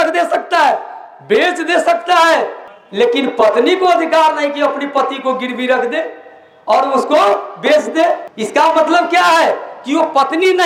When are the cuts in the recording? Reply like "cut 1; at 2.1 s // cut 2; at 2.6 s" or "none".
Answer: none

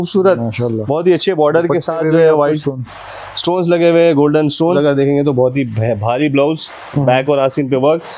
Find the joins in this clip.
cut 1; at 4.7 s

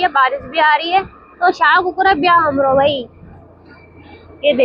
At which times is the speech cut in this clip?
none

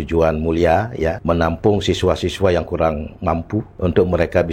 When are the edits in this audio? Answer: cut 1; at 1.2 s // cut 2; at 3.7 s

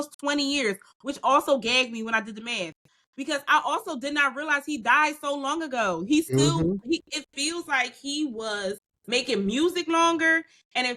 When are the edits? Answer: cut 1; at 8.9 s

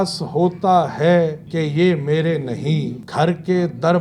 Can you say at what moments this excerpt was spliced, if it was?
cut 1; at 1.4 s // cut 2; at 3.0 s

